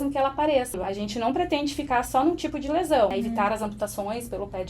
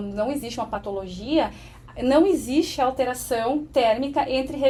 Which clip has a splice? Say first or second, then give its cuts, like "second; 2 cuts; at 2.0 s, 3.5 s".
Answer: first; 2 cuts; at 0.8 s, 3.1 s